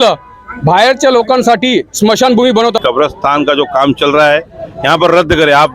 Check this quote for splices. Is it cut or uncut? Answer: cut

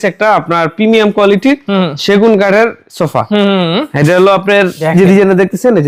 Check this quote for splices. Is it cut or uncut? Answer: uncut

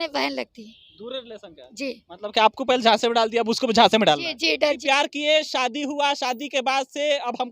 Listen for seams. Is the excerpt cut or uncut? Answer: cut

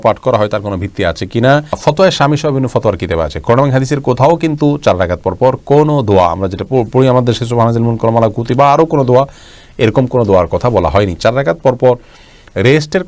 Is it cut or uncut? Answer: uncut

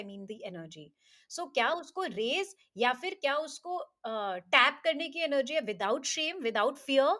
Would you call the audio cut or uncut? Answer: uncut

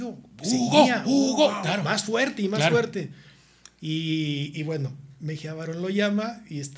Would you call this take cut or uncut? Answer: uncut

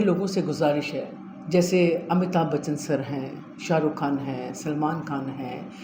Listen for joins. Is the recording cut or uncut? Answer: uncut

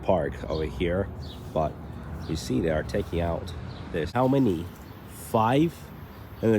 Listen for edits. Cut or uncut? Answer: cut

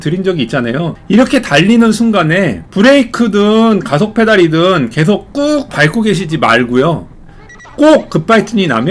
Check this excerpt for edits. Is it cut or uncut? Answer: cut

